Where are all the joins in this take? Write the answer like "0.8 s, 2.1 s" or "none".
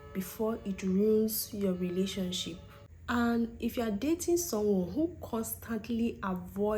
none